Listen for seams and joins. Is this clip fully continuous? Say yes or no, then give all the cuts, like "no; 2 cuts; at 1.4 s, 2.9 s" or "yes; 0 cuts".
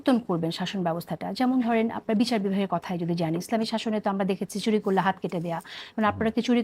yes; 0 cuts